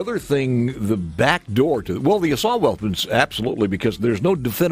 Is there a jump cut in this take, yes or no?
no